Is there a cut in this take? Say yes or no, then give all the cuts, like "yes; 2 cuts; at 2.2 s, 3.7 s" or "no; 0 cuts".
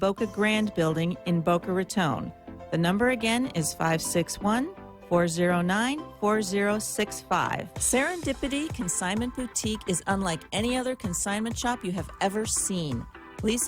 yes; 1 cut; at 7.9 s